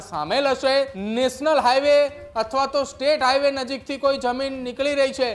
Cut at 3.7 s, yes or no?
no